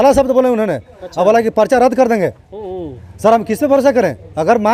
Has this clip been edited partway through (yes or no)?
no